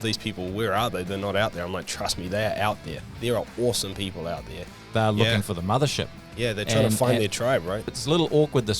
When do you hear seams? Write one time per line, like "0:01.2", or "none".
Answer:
0:04.9
0:07.9